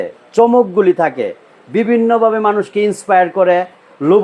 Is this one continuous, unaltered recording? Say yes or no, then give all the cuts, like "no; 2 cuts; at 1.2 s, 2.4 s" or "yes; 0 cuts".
yes; 0 cuts